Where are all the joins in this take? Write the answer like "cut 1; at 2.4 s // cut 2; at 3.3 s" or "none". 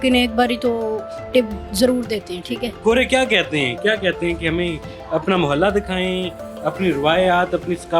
cut 1; at 2.7 s